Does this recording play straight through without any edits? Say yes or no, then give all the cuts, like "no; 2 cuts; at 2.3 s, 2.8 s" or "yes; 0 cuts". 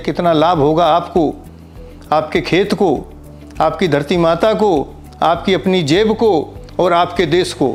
yes; 0 cuts